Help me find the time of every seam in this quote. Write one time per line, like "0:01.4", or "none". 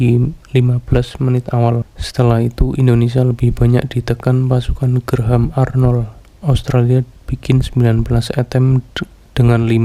0:02.0